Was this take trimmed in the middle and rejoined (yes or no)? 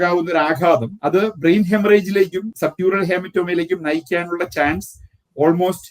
yes